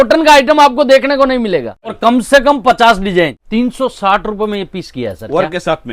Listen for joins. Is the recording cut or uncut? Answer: cut